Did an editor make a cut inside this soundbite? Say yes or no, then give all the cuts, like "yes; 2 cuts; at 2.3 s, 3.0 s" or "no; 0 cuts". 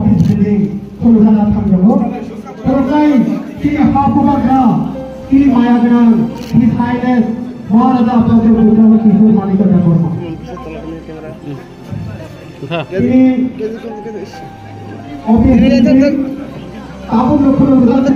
no; 0 cuts